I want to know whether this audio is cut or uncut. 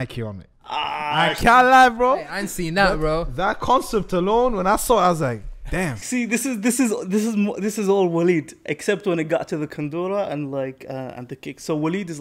uncut